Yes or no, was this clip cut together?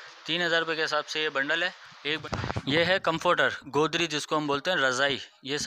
yes